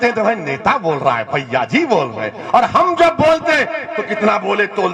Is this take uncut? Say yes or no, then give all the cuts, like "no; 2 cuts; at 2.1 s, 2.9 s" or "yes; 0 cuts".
yes; 0 cuts